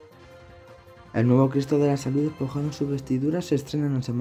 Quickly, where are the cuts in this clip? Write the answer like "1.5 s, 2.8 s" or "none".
1.1 s

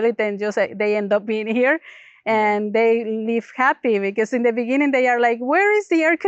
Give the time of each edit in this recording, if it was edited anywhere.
none

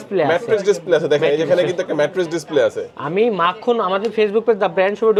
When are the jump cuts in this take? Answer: none

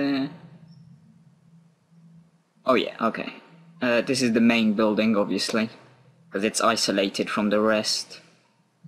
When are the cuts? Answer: 4.5 s

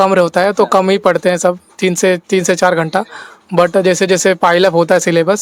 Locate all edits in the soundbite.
none

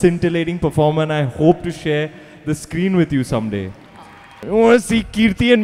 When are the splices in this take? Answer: 4.5 s

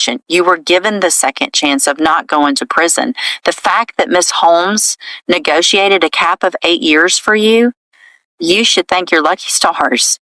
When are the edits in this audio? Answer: none

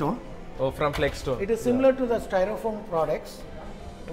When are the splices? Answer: none

